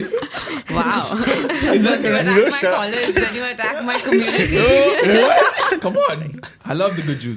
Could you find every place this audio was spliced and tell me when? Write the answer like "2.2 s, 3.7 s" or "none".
5.8 s